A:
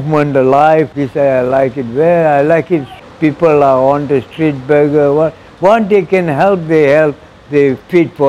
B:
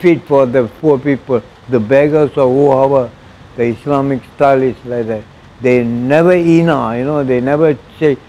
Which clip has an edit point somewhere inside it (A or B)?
A